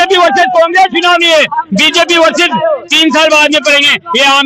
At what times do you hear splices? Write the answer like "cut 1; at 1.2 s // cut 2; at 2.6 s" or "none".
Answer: none